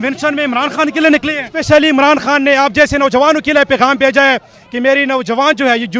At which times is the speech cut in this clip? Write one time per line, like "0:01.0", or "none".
0:01.5